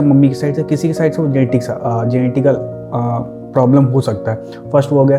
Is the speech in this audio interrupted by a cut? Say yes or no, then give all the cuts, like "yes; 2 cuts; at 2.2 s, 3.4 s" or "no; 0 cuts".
no; 0 cuts